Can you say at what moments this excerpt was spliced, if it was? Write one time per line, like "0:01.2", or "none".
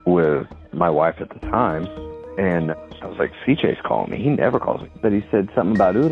0:04.9